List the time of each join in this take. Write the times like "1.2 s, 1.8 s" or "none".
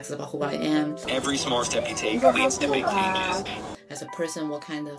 1.0 s, 3.8 s